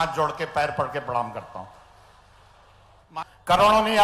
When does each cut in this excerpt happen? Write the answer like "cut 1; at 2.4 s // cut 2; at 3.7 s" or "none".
cut 1; at 3.0 s

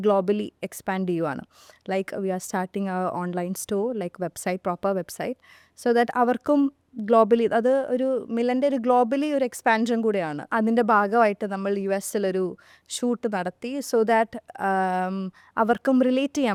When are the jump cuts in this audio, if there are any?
none

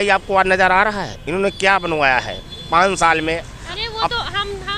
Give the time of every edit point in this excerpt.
none

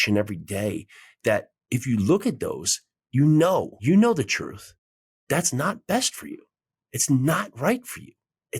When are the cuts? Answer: cut 1; at 3.8 s

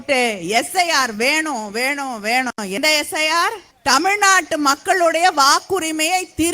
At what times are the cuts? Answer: cut 1; at 3.7 s

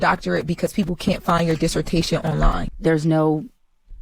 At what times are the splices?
cut 1; at 2.7 s

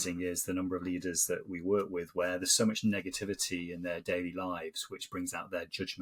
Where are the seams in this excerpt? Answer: none

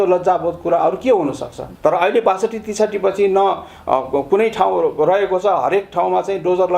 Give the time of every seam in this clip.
cut 1; at 1.7 s

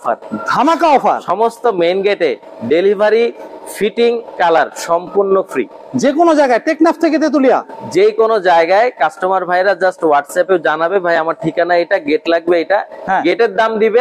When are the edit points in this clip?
none

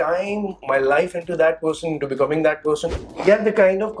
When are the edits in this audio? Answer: cut 1; at 3.0 s

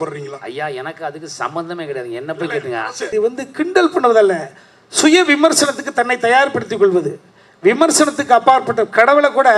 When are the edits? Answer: cut 1; at 3.1 s

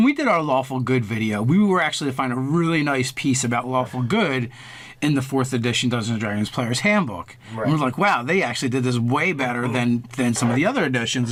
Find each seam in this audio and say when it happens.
none

